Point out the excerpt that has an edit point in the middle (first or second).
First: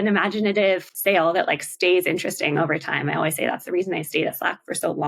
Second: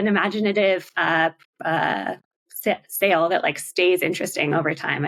first